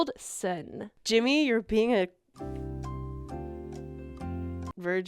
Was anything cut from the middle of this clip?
yes; 1 cut; at 2.3 s

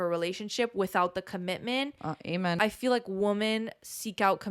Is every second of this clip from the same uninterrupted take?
no; 1 cut; at 2.6 s

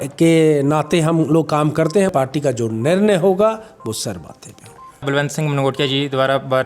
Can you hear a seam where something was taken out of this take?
yes; 2 cuts; at 2.1 s, 5.1 s

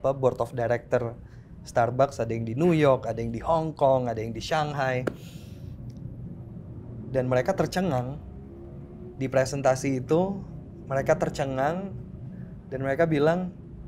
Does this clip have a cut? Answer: no; 0 cuts

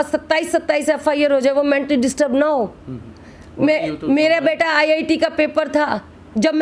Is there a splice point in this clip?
no; 0 cuts

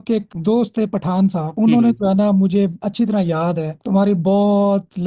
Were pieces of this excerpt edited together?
no; 0 cuts

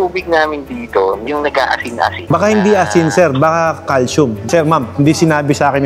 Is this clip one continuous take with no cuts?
no; 2 cuts; at 2.2 s, 4.4 s

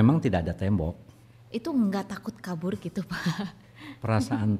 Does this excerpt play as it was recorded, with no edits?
yes; 0 cuts

